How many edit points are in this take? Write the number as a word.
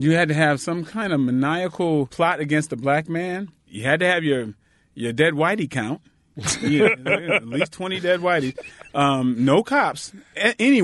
two